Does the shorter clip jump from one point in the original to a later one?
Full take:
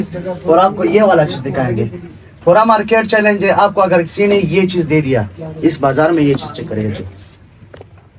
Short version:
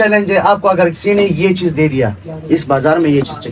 no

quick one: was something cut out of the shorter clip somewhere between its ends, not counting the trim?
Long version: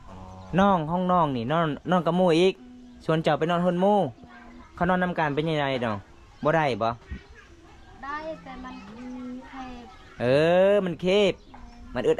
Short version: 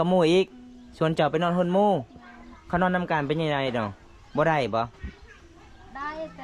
no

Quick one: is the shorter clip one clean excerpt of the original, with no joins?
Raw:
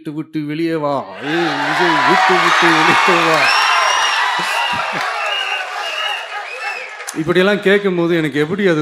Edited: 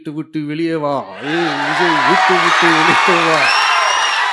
yes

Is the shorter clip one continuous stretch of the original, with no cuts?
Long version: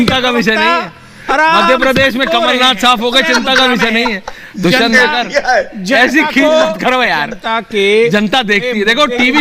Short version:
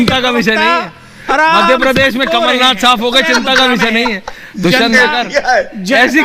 yes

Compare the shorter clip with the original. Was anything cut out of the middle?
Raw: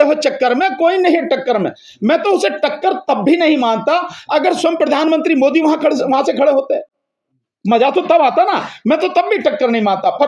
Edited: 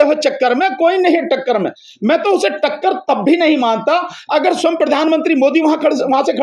no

